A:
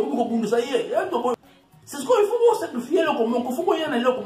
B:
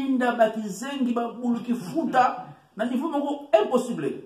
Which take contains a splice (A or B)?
A